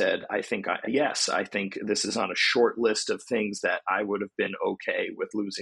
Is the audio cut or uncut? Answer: uncut